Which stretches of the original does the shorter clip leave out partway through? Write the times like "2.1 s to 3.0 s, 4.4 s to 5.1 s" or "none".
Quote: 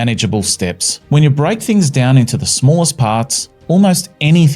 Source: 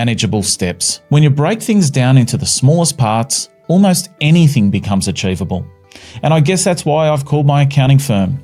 none